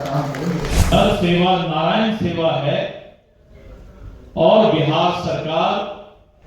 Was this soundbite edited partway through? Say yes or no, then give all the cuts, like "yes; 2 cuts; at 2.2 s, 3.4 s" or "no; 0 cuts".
yes; 1 cut; at 0.9 s